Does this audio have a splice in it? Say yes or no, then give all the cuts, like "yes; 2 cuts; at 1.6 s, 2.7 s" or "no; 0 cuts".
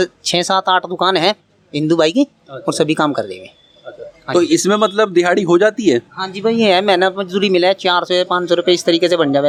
no; 0 cuts